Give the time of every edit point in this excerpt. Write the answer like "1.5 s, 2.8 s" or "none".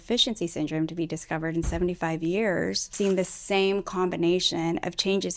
2.9 s